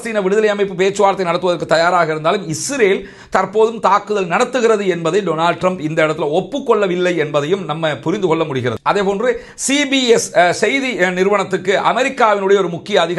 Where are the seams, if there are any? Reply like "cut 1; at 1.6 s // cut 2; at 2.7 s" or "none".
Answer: none